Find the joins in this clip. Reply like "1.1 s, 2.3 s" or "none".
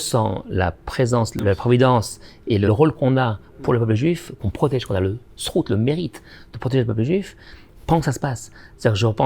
1.4 s, 2.7 s, 4.3 s